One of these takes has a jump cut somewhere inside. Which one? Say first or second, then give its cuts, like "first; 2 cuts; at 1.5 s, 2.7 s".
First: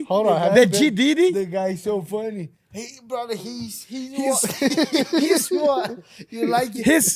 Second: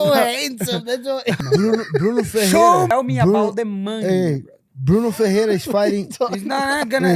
second; 2 cuts; at 1.4 s, 2.9 s